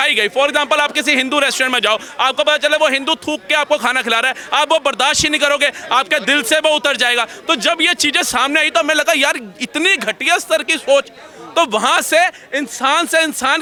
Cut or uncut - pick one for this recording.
uncut